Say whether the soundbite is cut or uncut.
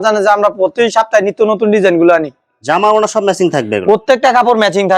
uncut